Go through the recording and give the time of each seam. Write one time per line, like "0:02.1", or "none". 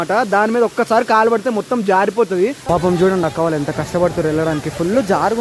0:02.6